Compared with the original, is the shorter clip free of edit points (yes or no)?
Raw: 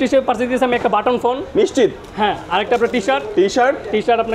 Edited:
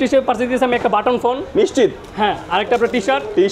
yes